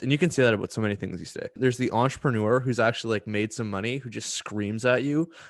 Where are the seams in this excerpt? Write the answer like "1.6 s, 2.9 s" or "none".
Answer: 1.5 s